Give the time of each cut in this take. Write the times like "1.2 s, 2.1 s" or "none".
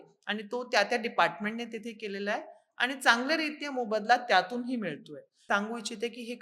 5.4 s